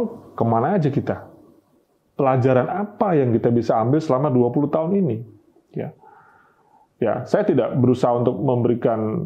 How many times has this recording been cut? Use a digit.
0